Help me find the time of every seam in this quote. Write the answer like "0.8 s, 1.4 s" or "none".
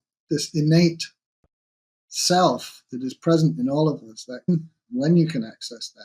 4.5 s

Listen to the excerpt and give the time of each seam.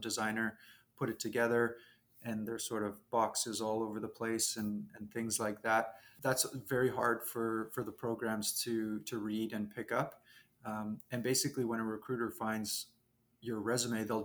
6.0 s

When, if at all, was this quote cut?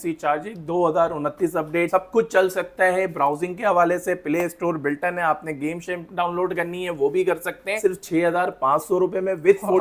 1.9 s, 7.8 s

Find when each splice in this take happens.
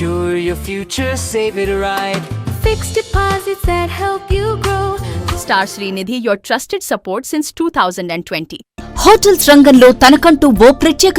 5.2 s, 8.7 s

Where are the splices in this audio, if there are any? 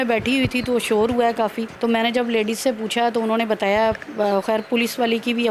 1.7 s

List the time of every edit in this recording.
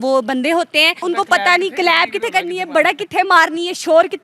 1.0 s

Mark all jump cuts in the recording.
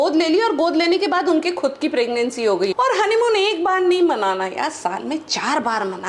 2.7 s

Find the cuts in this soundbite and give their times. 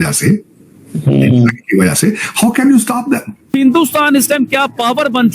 3.5 s

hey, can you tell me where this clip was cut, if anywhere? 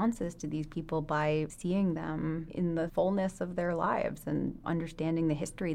1.5 s, 2.8 s, 4.6 s

